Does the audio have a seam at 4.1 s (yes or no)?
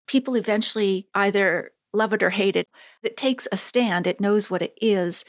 no